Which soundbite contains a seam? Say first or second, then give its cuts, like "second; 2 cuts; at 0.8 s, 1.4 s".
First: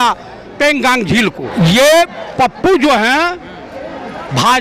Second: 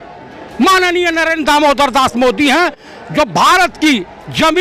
first; 1 cut; at 1.5 s